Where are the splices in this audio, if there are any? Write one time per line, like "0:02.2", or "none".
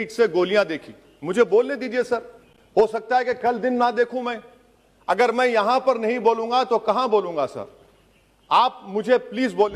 none